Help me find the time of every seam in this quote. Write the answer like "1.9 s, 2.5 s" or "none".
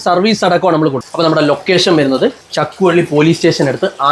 1.0 s, 2.5 s